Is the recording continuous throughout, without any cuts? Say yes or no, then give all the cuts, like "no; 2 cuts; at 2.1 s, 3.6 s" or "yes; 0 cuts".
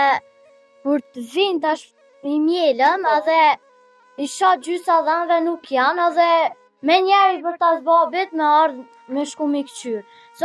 yes; 0 cuts